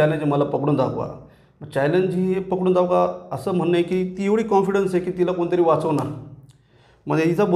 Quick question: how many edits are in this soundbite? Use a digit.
0